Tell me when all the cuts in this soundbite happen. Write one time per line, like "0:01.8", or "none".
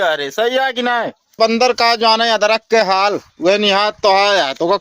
0:01.3